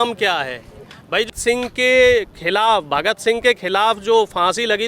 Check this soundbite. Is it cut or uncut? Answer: cut